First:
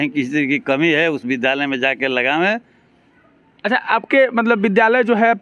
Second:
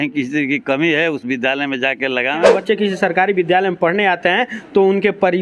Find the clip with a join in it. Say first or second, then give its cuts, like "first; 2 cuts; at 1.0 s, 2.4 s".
second; 1 cut; at 2.4 s